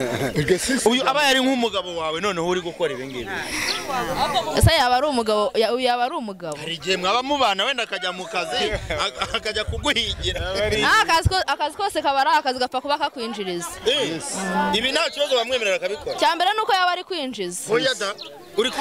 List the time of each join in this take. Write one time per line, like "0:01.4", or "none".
none